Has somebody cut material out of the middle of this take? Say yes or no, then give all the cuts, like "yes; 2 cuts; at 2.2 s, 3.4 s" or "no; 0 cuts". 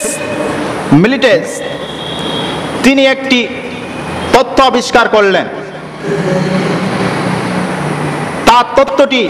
no; 0 cuts